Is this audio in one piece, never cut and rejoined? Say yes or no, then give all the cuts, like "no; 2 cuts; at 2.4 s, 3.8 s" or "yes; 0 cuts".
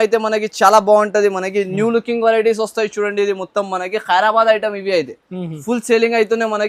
yes; 0 cuts